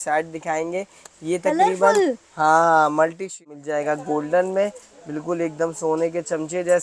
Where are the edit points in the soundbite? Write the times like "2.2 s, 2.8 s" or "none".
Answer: 3.4 s